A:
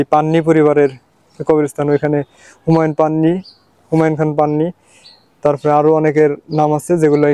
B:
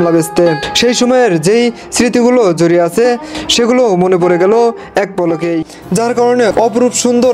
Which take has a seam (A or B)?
B